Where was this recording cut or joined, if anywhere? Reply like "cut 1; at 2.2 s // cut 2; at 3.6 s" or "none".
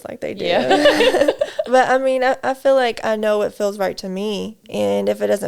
cut 1; at 4.6 s